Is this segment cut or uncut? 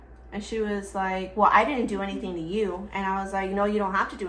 uncut